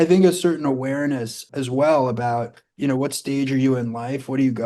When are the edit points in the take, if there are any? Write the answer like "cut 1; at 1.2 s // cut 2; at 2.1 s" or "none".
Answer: cut 1; at 1.4 s

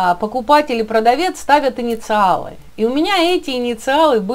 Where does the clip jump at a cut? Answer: none

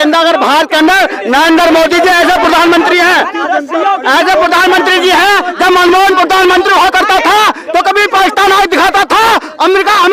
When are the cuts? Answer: none

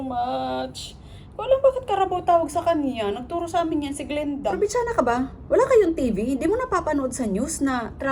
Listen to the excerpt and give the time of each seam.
cut 1; at 4.6 s

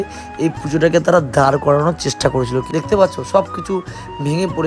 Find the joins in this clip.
cut 1; at 2.7 s

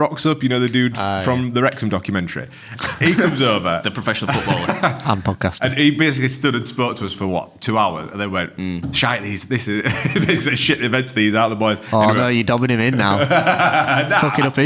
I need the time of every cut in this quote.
none

